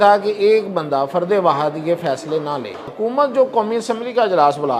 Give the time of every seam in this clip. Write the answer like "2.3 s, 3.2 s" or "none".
2.9 s